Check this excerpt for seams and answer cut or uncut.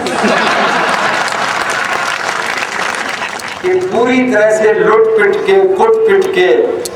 cut